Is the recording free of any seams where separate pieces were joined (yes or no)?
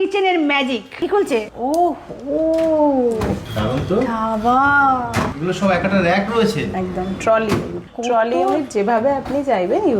yes